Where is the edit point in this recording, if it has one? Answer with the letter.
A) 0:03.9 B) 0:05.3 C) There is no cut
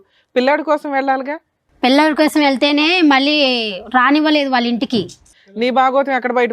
B